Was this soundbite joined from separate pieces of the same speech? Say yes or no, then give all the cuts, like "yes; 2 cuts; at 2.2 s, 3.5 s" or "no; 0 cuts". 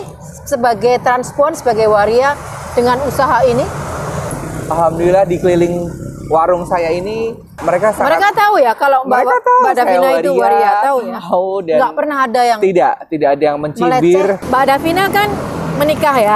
yes; 3 cuts; at 4.4 s, 7.5 s, 14.4 s